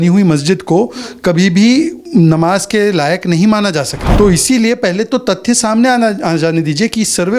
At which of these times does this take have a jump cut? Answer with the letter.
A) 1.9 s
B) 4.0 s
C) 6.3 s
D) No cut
B